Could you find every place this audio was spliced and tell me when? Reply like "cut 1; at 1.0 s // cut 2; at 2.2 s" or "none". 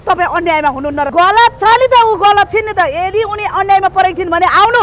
cut 1; at 1.1 s